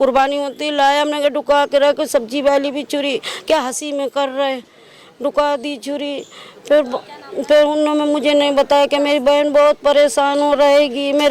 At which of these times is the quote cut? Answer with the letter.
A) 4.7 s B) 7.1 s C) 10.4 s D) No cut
D